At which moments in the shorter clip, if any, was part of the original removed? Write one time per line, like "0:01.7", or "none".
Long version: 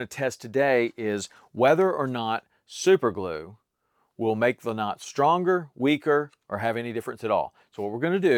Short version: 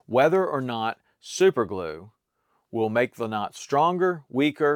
none